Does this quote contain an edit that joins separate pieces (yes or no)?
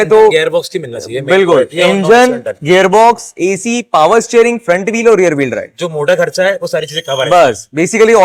no